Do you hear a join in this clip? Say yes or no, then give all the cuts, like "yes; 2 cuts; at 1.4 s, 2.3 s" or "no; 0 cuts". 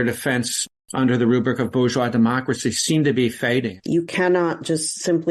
yes; 1 cut; at 3.7 s